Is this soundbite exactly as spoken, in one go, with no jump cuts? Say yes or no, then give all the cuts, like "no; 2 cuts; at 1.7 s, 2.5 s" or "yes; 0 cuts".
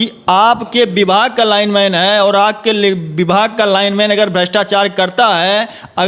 yes; 0 cuts